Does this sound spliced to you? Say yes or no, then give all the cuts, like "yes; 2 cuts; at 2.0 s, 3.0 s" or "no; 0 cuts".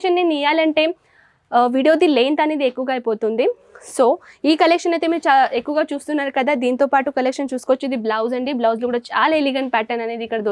no; 0 cuts